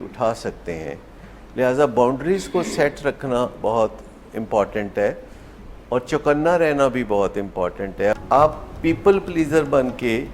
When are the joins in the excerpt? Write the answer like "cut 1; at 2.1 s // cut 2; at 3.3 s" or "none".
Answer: cut 1; at 8.2 s